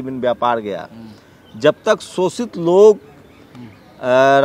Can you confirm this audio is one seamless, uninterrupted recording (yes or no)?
yes